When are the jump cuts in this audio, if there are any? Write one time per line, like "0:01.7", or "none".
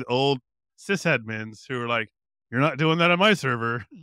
none